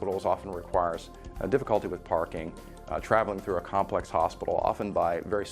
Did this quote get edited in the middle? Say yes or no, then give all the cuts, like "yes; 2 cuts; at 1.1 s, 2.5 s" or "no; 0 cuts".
yes; 1 cut; at 2.8 s